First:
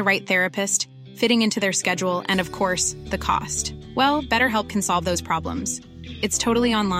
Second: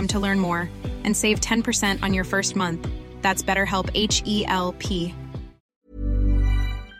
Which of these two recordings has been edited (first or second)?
second